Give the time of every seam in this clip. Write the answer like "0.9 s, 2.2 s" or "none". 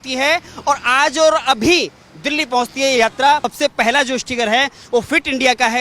3.5 s